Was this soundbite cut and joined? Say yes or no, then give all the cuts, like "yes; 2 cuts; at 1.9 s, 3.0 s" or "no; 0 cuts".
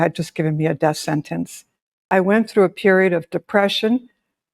yes; 1 cut; at 2.1 s